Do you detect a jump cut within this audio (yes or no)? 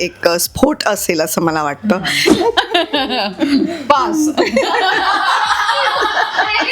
yes